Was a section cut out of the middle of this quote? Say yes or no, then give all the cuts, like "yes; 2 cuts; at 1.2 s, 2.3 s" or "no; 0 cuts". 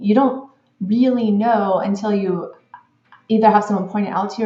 no; 0 cuts